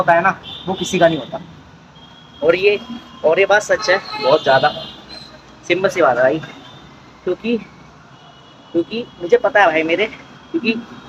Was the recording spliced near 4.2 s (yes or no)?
no